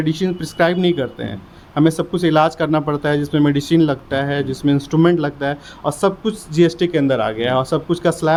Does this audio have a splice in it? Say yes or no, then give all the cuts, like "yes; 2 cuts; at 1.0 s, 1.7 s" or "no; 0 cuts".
no; 0 cuts